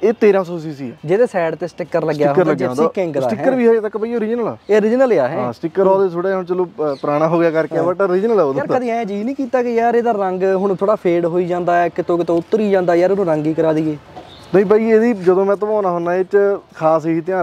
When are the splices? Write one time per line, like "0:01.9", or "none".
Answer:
none

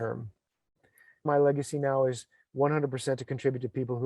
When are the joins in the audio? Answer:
0:01.2

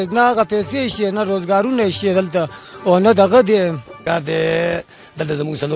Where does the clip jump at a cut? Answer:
0:04.0

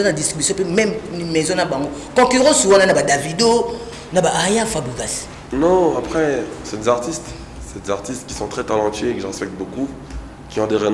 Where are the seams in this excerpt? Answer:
none

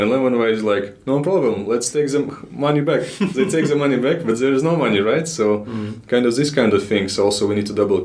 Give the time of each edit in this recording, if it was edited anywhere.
none

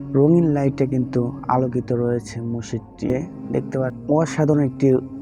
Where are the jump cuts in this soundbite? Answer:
0:04.0

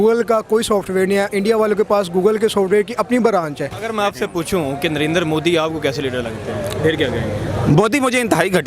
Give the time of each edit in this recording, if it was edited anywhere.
0:03.9

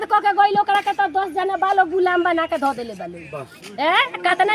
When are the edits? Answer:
none

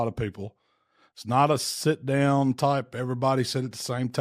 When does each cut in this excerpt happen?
none

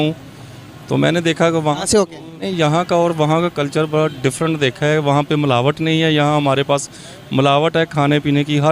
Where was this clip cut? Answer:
0:02.5

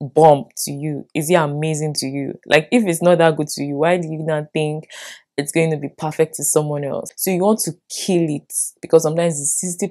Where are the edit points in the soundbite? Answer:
0:07.1

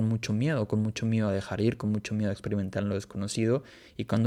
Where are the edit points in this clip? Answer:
none

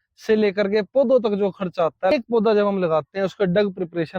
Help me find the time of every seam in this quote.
0:02.1

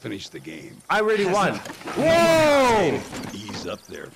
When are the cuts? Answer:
none

